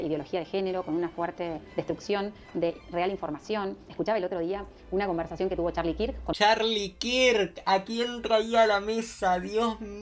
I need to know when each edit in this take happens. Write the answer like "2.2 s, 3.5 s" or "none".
3.9 s, 6.3 s